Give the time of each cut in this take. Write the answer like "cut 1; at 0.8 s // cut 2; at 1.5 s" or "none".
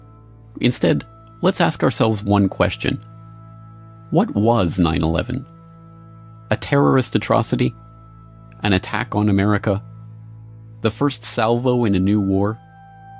cut 1; at 9.8 s